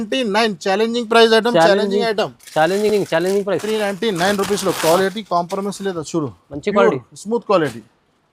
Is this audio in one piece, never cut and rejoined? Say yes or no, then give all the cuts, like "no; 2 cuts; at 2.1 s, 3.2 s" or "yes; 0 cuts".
yes; 0 cuts